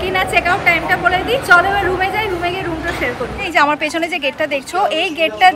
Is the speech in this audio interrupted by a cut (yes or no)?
yes